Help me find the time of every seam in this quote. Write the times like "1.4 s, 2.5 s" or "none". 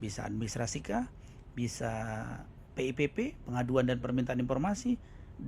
none